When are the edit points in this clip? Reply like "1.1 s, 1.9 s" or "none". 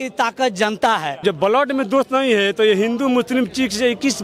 1.2 s